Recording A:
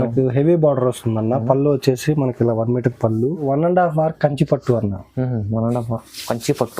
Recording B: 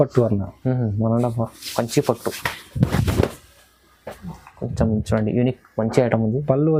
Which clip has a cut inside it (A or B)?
A